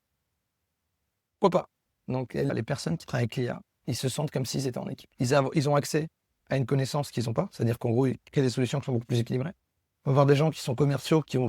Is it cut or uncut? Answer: cut